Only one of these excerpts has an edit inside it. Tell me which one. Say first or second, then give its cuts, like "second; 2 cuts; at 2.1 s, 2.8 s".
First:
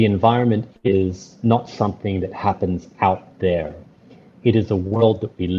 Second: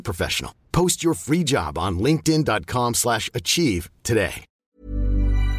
second; 1 cut; at 4.6 s